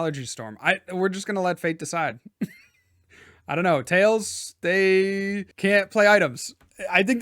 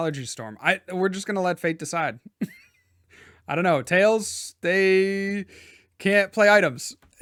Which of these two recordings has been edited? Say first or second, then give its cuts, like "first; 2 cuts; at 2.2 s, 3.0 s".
first; 1 cut; at 5.4 s